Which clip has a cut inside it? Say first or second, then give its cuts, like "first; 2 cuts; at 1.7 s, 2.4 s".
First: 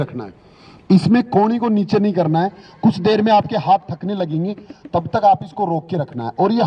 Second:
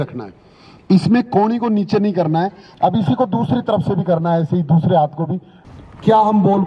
second; 2 cuts; at 2.6 s, 5.5 s